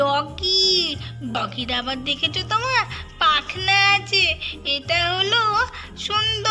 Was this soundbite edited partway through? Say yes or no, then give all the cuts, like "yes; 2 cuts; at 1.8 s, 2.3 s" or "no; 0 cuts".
yes; 1 cut; at 1.4 s